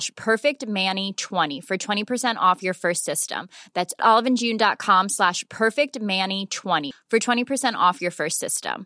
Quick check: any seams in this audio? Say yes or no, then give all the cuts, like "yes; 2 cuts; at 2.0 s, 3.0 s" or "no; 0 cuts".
yes; 1 cut; at 1.5 s